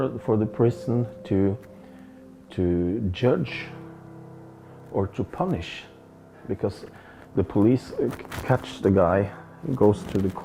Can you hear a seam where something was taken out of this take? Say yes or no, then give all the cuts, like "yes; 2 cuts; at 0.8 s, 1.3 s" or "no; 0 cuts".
no; 0 cuts